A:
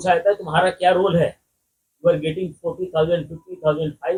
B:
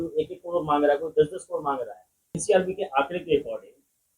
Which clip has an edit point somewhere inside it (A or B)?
B